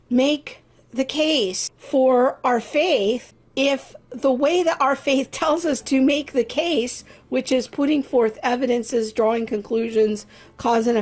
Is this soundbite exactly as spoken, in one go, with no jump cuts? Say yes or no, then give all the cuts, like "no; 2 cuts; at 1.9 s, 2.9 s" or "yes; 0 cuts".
no; 2 cuts; at 1.7 s, 3.4 s